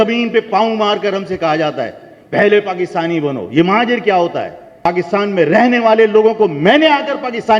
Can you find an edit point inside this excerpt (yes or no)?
yes